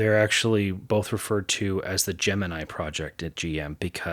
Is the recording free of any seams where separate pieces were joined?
yes; 0 cuts

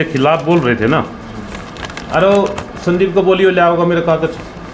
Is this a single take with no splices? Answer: yes; 0 cuts

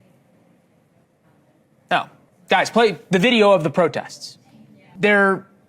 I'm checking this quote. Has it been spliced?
yes; 2 cuts; at 2.3 s, 4.8 s

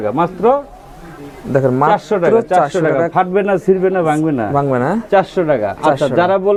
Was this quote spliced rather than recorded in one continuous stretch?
no; 0 cuts

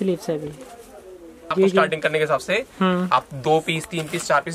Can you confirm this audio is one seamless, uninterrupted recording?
no; 1 cut; at 1.5 s

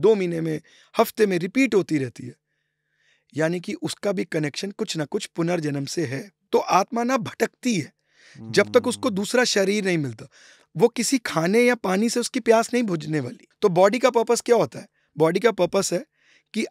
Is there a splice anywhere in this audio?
yes; 2 cuts; at 6.3 s, 13.4 s

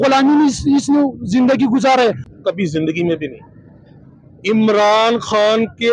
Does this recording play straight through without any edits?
no; 1 cut; at 2.3 s

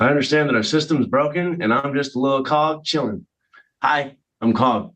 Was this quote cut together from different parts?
no; 0 cuts

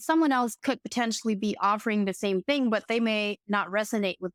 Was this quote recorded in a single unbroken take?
yes; 0 cuts

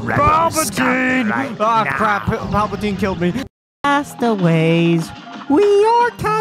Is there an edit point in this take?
yes; 1 cut; at 3.4 s

